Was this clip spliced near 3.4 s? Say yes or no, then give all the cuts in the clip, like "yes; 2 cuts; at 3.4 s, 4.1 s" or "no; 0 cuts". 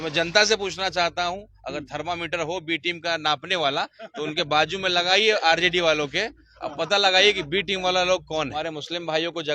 no; 1 cut; at 8.6 s